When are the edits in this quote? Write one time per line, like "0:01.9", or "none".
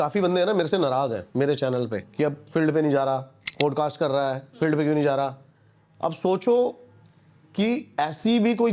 0:01.2
0:02.0
0:03.4